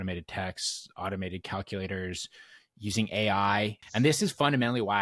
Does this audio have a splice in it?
yes; 1 cut; at 3.8 s

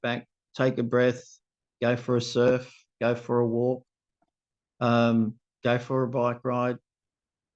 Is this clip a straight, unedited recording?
yes; 0 cuts

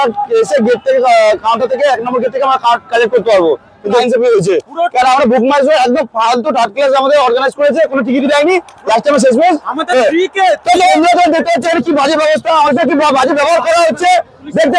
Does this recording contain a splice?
yes; 2 cuts; at 4.0 s, 10.9 s

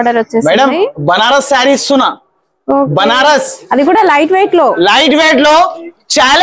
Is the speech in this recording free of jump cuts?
yes; 0 cuts

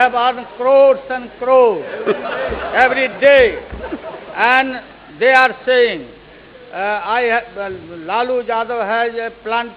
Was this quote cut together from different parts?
no; 0 cuts

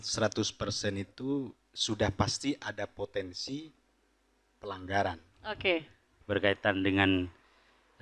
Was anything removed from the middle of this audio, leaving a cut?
yes; 1 cut; at 6.1 s

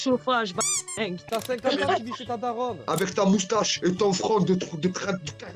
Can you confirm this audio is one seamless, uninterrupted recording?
no; 2 cuts; at 1.2 s, 2.9 s

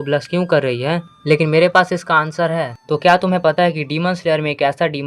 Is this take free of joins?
no; 1 cut; at 2.8 s

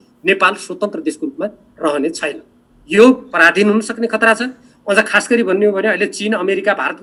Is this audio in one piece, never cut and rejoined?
yes; 0 cuts

